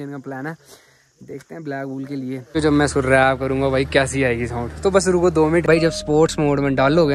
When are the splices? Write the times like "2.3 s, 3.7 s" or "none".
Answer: 2.5 s, 5.6 s